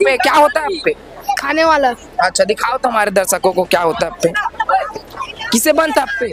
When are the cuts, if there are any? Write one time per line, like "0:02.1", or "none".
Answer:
none